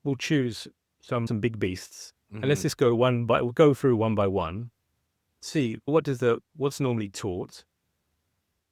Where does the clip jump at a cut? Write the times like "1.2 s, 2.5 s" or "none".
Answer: 1.3 s